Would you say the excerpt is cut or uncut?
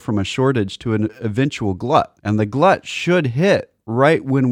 cut